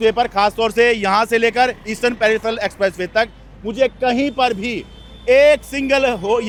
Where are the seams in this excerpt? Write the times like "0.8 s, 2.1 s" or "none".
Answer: none

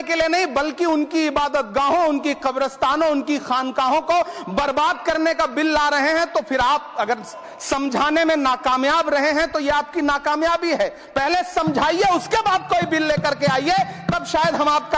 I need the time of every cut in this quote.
none

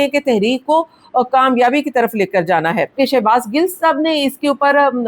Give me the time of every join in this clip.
2.9 s

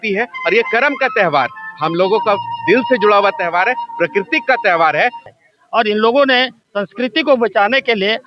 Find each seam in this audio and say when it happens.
5.2 s

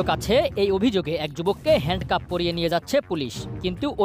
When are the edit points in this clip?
none

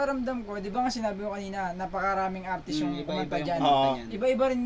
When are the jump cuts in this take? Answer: none

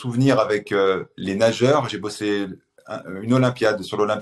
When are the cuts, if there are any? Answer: 1.1 s

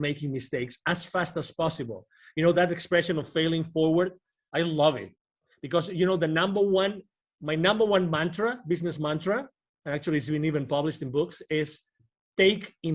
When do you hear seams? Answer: none

